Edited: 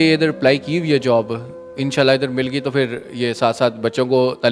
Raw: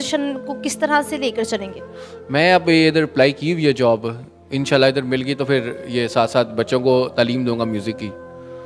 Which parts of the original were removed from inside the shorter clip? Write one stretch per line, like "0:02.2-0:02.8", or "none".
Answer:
none